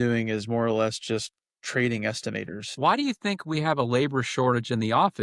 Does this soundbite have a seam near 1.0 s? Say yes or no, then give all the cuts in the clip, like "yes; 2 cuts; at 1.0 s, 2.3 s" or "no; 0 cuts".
no; 1 cut; at 2.6 s